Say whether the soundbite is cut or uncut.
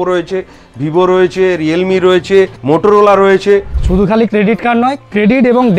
cut